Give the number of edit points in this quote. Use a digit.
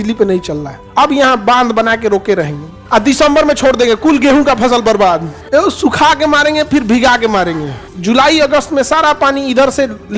3